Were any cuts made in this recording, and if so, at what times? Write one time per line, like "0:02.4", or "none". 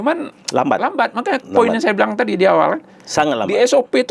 none